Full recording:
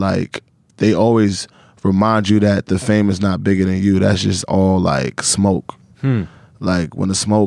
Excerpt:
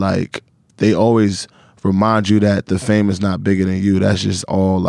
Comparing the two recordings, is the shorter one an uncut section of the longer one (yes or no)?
yes